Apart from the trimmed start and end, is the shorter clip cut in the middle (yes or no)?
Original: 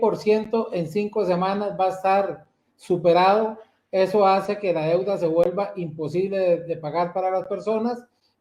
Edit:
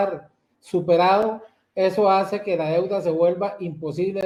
no